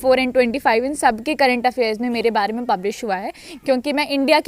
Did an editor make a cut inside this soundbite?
no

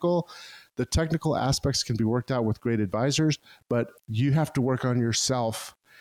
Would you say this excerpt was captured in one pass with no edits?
no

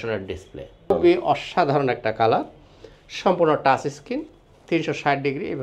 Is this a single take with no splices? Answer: no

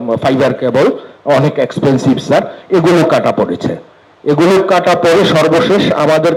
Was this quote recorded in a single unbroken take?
yes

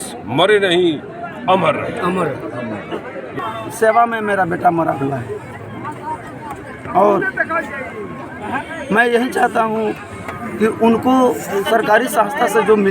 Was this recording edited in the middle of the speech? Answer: yes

